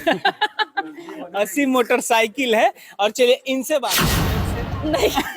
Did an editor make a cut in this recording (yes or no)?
yes